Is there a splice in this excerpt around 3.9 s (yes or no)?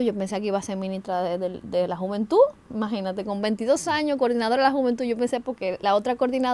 no